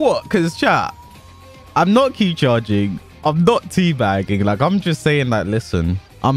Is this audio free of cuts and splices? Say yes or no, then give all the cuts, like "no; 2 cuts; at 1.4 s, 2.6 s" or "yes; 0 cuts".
yes; 0 cuts